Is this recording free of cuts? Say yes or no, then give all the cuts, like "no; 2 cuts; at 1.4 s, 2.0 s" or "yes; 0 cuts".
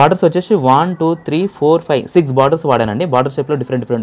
yes; 0 cuts